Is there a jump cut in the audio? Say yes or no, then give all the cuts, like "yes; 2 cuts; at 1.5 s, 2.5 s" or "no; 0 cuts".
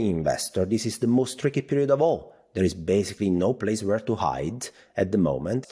no; 0 cuts